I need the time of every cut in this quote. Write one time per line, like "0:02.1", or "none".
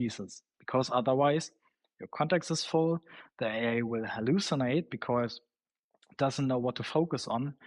none

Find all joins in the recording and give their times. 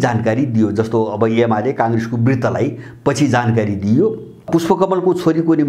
0:04.4

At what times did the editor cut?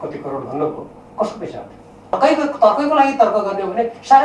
0:02.1

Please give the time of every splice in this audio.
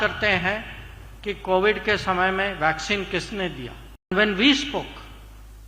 0:04.1

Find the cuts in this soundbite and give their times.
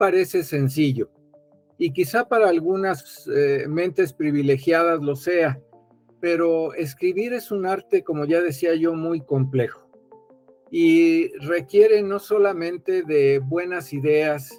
none

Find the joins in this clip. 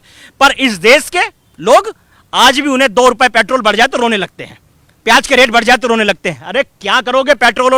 none

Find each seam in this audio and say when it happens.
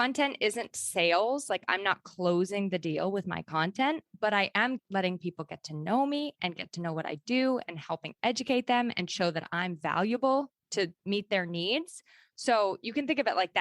0:04.8

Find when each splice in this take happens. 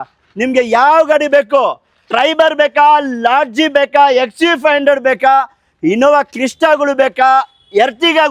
none

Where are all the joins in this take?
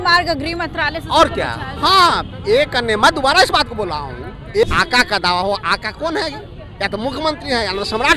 0:04.6

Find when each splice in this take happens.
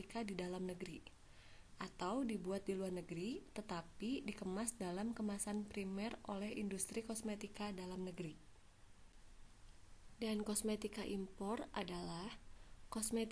0:09.1

